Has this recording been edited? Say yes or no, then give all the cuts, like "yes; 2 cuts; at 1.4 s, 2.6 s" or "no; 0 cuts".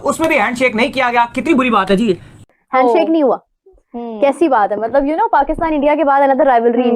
no; 0 cuts